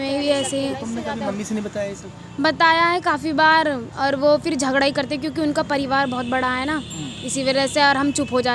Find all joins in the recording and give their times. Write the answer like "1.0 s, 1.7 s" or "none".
none